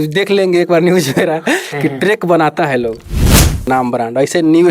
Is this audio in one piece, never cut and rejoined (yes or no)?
no